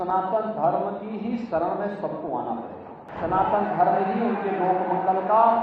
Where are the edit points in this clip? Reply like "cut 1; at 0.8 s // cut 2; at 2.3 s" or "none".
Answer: cut 1; at 3.0 s